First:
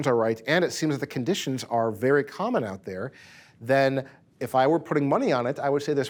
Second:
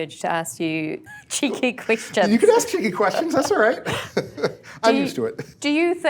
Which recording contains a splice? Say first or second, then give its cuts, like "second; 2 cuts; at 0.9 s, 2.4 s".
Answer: second; 1 cut; at 1.0 s